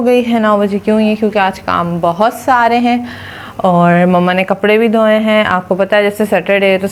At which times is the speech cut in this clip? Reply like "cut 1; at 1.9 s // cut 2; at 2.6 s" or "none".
none